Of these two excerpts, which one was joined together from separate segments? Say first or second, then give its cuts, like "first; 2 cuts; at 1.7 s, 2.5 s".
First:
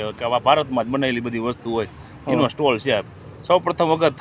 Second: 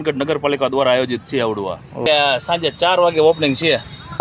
second; 1 cut; at 1.9 s